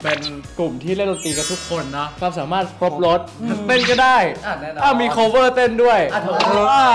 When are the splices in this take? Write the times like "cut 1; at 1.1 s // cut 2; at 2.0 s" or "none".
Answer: cut 1; at 2.2 s